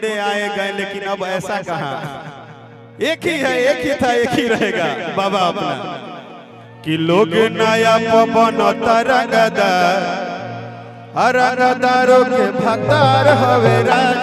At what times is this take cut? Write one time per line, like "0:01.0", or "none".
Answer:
none